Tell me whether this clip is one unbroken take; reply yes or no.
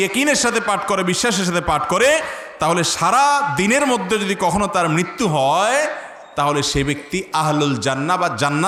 yes